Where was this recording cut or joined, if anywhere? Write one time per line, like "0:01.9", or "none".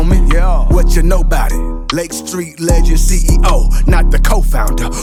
none

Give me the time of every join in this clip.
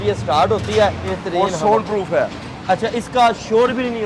0:01.1

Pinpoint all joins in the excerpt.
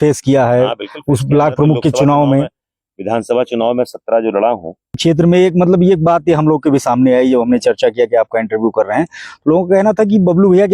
0:05.0

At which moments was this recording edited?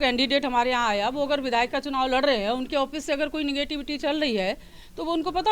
none

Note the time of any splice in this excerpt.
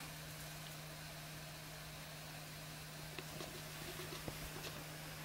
0:02.6

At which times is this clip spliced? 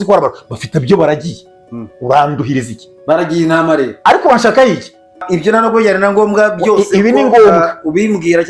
0:05.2

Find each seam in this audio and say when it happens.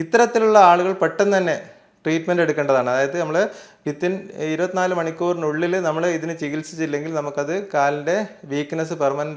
none

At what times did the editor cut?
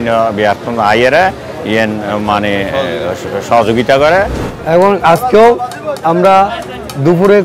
0:04.4

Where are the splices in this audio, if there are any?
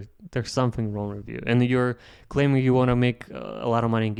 none

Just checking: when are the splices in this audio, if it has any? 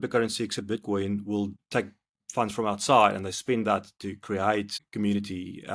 0:01.6
0:04.8

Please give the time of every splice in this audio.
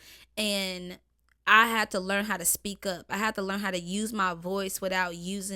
none

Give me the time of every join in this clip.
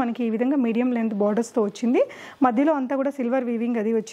none

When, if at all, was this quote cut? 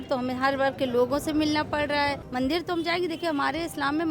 0:02.2

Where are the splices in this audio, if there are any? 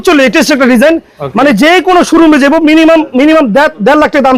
none

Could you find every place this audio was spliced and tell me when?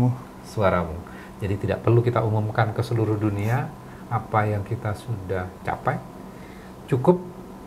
none

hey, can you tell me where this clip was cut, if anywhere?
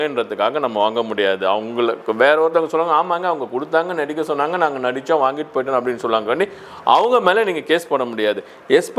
none

